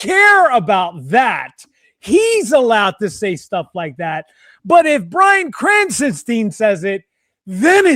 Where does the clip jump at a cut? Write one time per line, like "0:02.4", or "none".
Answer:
none